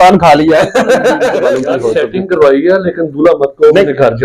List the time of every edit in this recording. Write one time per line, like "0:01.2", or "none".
0:01.6